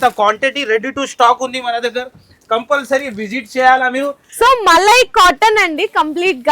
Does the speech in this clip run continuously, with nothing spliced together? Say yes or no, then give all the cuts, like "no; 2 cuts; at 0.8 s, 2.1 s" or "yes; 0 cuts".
yes; 0 cuts